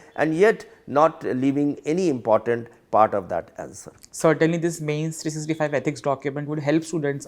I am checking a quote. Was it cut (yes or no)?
no